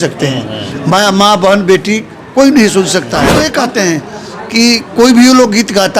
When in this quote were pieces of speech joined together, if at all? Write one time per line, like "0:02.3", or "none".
0:03.2